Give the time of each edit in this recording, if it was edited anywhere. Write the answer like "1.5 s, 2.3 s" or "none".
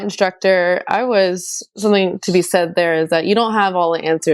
1.7 s

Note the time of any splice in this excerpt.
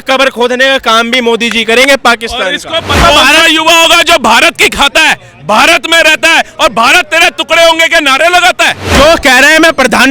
3.0 s, 8.9 s

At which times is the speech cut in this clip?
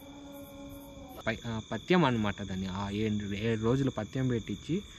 1.2 s

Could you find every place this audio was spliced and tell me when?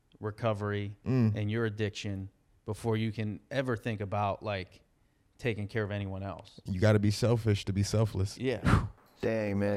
none

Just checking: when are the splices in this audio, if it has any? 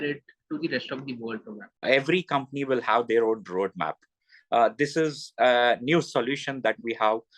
1.7 s

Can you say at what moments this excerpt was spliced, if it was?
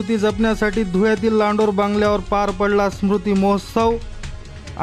none

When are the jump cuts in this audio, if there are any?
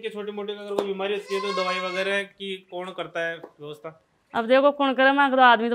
none

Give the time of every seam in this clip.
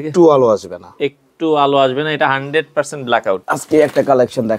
3.4 s

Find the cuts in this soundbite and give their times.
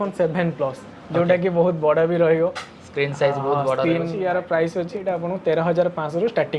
4.1 s, 5.0 s

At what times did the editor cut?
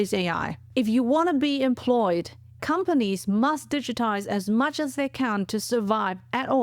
2.5 s

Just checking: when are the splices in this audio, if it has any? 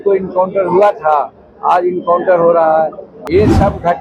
3.1 s

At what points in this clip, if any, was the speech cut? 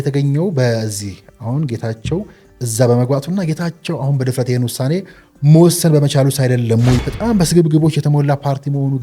7.0 s

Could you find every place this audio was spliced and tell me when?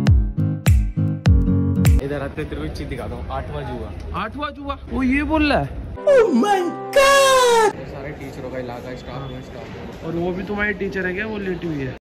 2.0 s, 4.8 s, 7.7 s

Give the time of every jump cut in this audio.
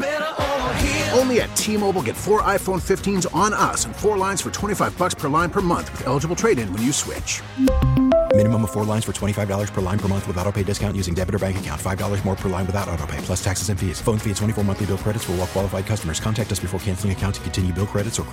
none

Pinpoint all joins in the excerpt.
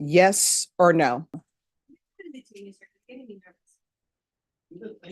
1.3 s

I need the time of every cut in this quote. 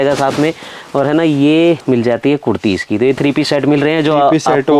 none

